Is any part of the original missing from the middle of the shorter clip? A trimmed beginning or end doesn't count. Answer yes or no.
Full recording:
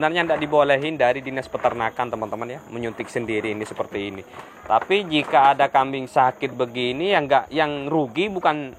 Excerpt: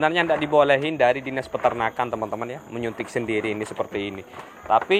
no